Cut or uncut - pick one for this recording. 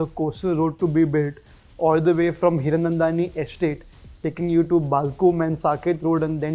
uncut